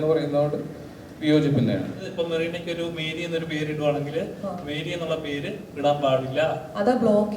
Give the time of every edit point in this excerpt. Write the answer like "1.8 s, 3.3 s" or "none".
2.1 s